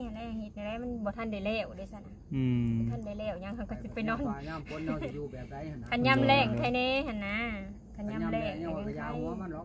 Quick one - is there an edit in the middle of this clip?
no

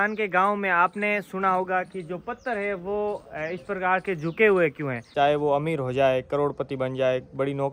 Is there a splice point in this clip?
yes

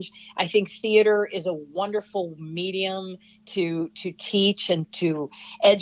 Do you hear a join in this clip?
no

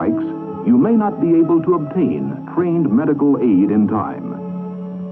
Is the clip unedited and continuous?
no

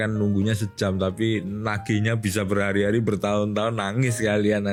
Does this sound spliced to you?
no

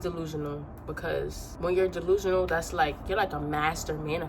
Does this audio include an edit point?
yes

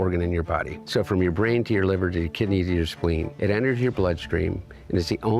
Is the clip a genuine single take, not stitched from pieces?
yes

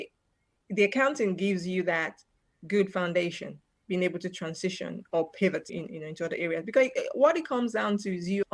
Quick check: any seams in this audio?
no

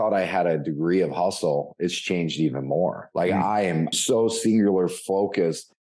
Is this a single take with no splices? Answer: no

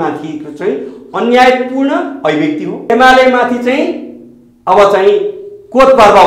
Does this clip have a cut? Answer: yes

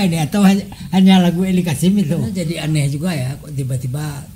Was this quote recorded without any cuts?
no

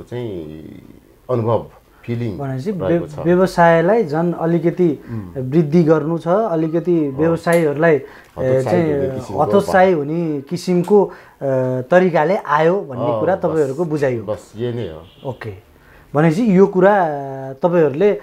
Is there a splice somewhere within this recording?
no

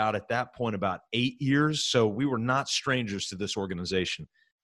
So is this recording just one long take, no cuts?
no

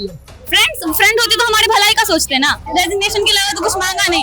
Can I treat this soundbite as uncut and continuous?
no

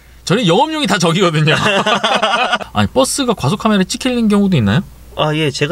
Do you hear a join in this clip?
yes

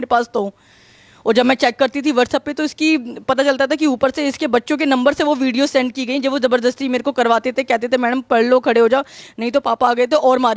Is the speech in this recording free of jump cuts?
yes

